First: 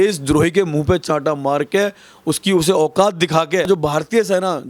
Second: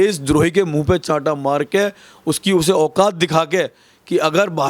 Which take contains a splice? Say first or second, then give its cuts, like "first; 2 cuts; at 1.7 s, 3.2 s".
first; 1 cut; at 3.7 s